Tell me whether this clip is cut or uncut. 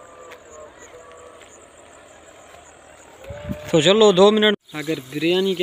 cut